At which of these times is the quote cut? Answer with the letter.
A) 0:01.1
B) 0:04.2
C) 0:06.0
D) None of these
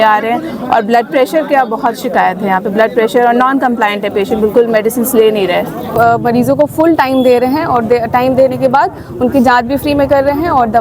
C